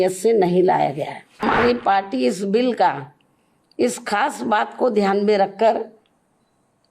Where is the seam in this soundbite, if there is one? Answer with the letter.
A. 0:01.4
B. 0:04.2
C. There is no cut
A